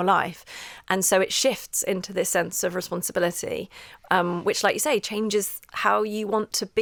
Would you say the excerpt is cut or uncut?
uncut